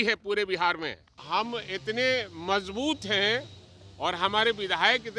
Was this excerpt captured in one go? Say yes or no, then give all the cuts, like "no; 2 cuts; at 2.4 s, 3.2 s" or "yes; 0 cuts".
no; 1 cut; at 1.1 s